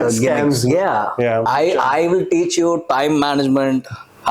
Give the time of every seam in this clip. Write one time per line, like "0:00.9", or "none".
0:01.5